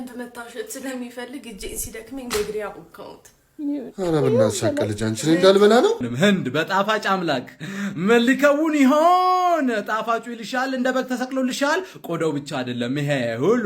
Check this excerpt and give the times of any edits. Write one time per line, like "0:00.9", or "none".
0:06.1

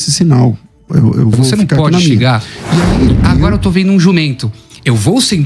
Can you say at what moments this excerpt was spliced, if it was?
0:03.5

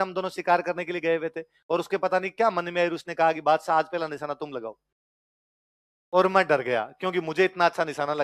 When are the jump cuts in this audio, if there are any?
none

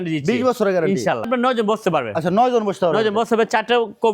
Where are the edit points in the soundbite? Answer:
0:01.3

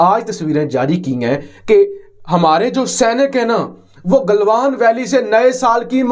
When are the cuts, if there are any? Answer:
none

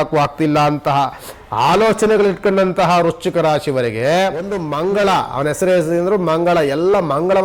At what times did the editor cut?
0:04.6

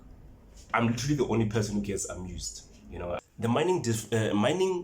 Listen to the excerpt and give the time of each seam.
0:03.2

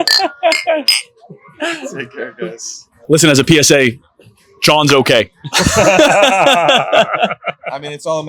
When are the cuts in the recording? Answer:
0:03.0

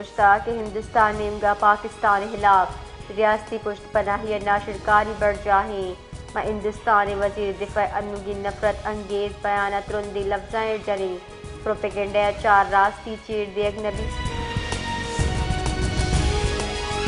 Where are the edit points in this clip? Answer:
none

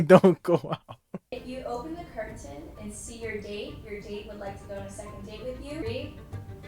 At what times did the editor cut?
0:01.5
0:05.8

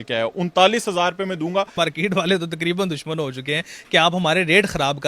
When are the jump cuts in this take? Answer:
0:01.7

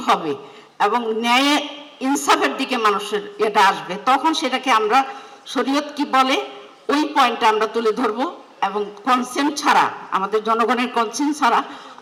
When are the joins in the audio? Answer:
none

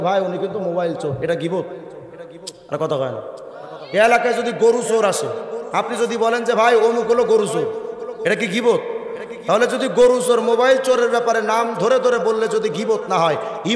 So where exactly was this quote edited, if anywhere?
none

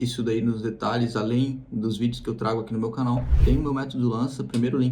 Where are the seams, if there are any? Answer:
0:03.3

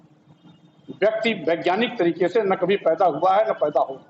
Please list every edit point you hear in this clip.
none

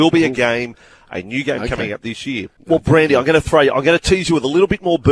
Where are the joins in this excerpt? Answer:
0:02.5

